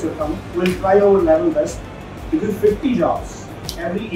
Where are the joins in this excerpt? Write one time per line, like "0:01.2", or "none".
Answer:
none

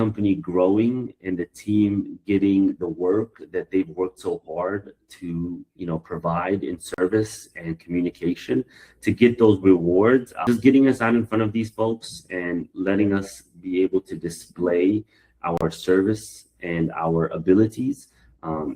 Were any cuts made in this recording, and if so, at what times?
0:10.4

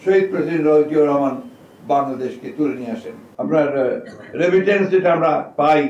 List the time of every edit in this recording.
0:03.2

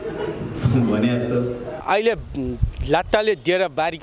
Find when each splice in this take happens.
0:01.7

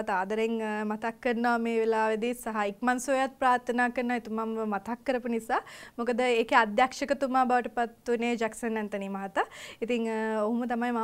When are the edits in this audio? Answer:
none

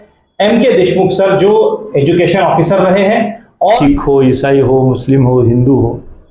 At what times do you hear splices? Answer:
0:03.8

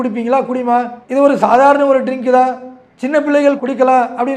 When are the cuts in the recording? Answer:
none

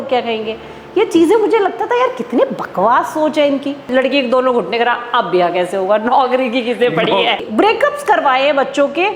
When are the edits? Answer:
0:03.9
0:07.4

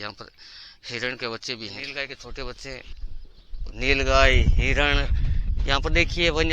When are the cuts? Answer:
0:01.9

